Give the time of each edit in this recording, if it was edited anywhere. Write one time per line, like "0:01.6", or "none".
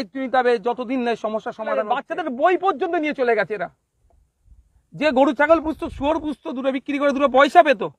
0:01.8